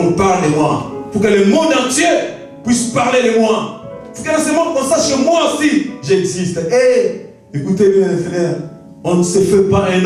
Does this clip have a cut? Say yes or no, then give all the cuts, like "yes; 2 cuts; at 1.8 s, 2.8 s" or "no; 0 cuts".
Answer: no; 0 cuts